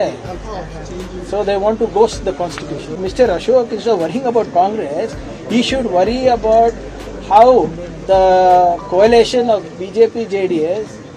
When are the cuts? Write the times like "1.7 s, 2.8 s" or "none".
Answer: 3.0 s